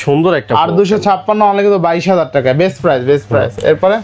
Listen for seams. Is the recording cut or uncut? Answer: uncut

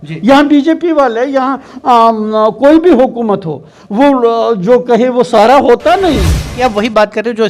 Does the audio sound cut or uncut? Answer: cut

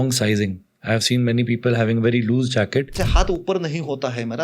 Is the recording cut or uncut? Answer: cut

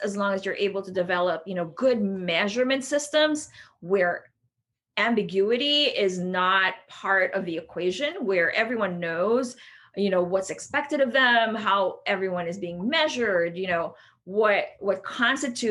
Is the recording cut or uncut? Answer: uncut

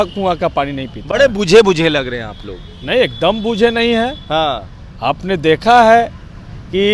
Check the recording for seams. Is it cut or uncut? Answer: uncut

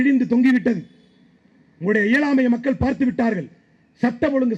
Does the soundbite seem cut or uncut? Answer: uncut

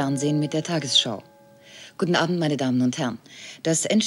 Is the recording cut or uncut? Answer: uncut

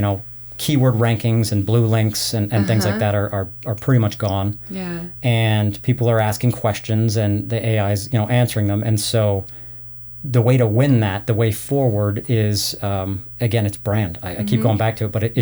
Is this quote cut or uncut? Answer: uncut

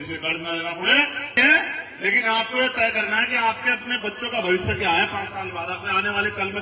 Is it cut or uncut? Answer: cut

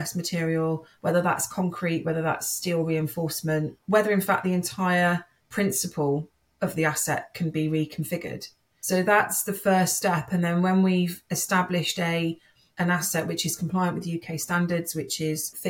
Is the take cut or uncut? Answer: uncut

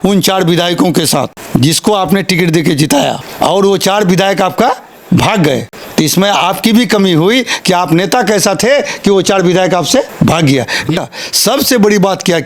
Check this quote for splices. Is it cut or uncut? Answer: cut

